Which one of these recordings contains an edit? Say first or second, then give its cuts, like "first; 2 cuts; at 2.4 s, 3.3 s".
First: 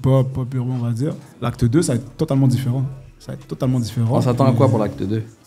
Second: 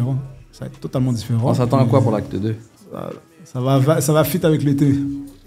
first; 1 cut; at 1.3 s